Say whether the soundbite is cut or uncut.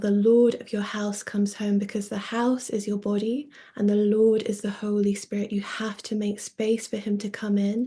uncut